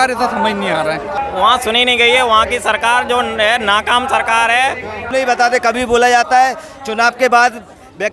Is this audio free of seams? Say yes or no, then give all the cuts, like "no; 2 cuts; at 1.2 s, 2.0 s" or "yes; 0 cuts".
no; 2 cuts; at 1.1 s, 5.0 s